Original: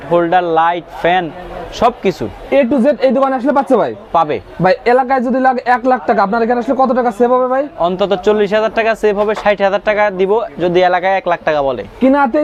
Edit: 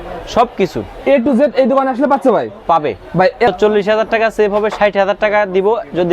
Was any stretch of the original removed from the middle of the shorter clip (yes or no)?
yes